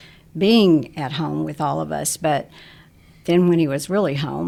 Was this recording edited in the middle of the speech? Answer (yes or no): no